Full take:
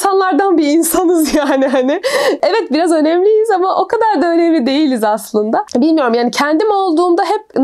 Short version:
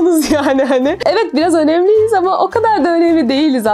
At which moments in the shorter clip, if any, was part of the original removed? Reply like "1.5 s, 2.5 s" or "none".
1.0 s